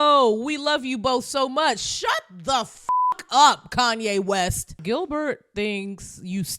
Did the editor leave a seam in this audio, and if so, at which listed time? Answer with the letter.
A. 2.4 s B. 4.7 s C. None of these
B